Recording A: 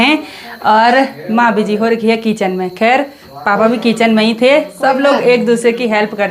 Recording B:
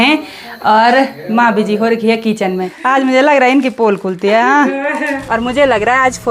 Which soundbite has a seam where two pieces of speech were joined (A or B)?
B